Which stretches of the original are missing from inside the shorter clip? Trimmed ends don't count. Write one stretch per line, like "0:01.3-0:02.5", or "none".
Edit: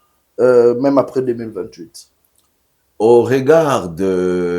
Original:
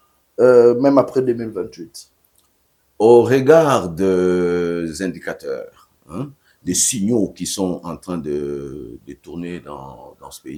none